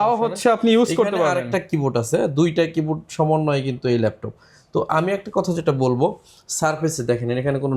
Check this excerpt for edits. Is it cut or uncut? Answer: uncut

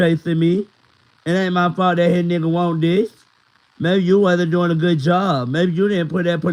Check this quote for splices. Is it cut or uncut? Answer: uncut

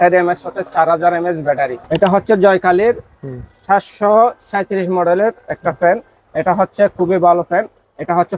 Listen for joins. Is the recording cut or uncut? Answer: cut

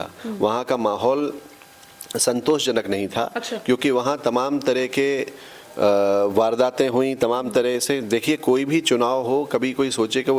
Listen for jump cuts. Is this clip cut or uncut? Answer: uncut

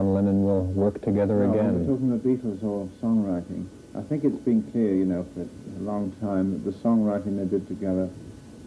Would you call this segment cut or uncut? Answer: uncut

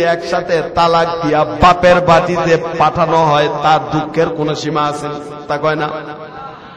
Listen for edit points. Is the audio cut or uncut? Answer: cut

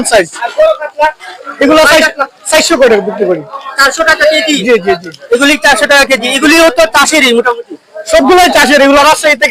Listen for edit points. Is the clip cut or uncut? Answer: uncut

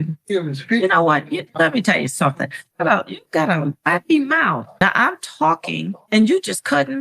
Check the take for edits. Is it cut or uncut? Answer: cut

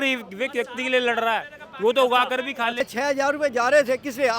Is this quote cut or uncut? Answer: cut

